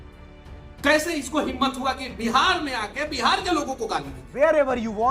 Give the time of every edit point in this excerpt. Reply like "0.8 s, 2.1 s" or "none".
4.2 s

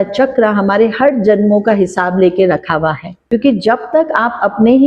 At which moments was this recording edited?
3.3 s

